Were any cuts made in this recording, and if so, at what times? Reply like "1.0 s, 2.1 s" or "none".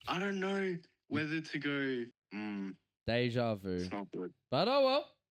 2.2 s